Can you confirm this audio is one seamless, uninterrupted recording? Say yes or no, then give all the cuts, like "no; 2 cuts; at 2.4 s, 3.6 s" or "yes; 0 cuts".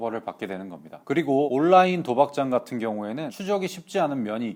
yes; 0 cuts